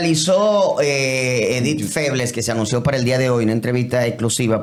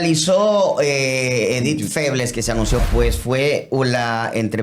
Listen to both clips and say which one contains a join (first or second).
second